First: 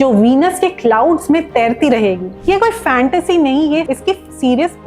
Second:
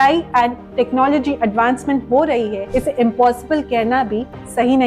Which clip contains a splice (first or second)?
first